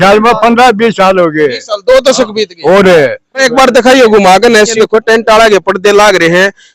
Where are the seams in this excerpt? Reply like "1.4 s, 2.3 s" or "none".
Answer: 3.4 s, 4.7 s